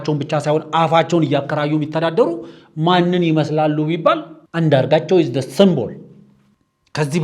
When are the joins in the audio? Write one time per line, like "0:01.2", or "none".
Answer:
0:04.4